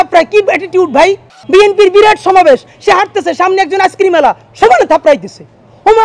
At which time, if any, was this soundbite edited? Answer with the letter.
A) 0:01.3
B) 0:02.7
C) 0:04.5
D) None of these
A